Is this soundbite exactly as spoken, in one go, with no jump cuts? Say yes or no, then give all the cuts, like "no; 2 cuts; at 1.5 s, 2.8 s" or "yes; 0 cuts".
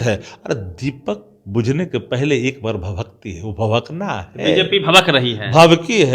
yes; 0 cuts